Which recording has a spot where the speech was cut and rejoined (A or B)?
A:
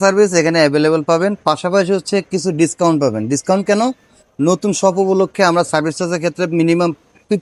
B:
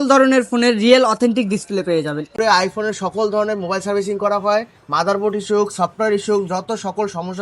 B